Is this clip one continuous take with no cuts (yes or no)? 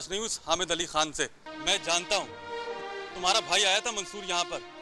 no